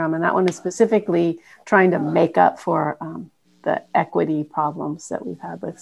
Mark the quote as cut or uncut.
uncut